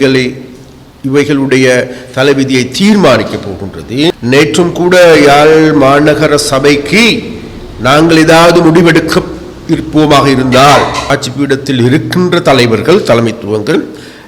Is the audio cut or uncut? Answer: cut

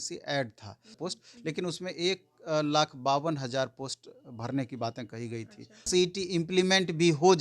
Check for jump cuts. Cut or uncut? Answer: cut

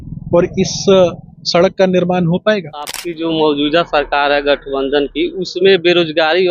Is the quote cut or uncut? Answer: cut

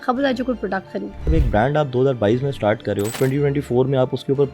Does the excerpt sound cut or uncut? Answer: cut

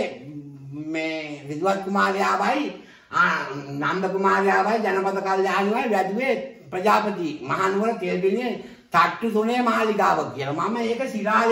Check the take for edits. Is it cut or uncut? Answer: uncut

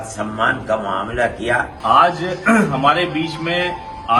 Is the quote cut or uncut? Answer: cut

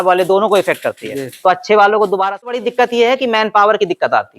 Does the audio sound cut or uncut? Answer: cut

